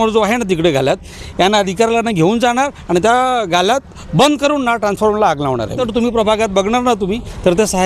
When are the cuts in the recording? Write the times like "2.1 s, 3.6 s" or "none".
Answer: 5.8 s